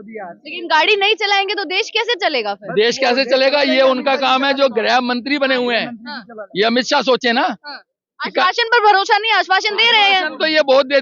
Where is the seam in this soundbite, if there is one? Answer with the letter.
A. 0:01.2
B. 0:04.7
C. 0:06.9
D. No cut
D